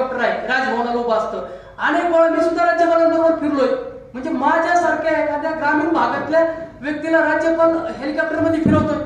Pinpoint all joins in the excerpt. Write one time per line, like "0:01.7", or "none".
none